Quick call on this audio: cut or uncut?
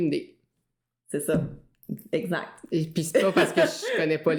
uncut